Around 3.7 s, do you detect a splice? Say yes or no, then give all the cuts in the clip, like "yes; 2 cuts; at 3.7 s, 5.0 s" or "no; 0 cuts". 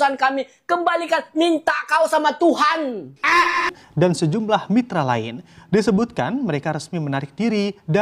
yes; 1 cut; at 3.7 s